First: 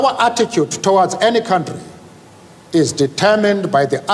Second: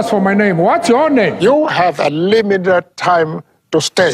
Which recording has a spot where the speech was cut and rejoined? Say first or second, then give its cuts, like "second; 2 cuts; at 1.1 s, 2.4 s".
second; 1 cut; at 1.4 s